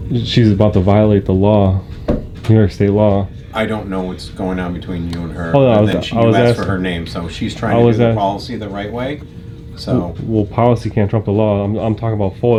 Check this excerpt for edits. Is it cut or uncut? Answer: uncut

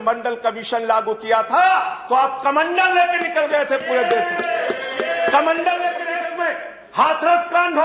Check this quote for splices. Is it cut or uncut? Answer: cut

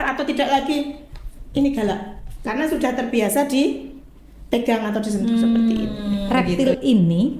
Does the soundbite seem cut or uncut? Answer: cut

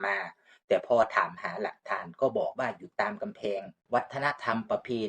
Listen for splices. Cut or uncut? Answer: cut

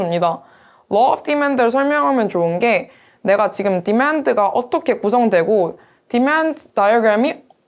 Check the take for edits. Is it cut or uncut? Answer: uncut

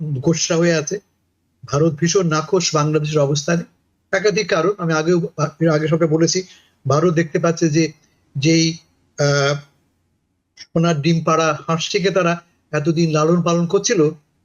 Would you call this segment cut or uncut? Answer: uncut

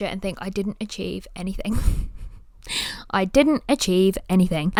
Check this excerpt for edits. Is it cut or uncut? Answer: uncut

